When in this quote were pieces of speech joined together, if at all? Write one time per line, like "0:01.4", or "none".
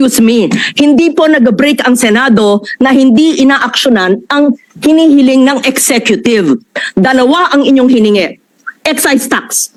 none